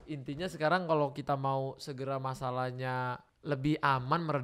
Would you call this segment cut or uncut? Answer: cut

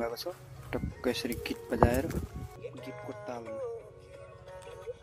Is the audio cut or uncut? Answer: cut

